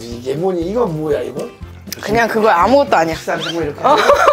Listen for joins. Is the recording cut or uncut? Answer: cut